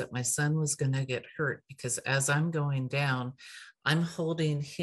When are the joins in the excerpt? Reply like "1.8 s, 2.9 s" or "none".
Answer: none